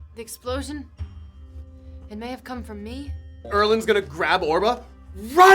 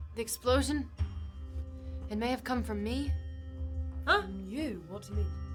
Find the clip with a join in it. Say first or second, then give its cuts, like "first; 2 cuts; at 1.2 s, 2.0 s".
first; 1 cut; at 3.4 s